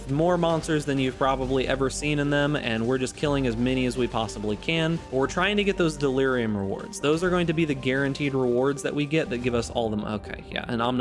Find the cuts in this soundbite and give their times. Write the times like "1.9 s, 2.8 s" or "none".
5.0 s